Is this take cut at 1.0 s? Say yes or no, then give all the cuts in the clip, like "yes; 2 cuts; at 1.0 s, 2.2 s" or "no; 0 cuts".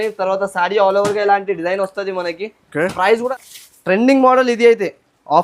no; 1 cut; at 3.3 s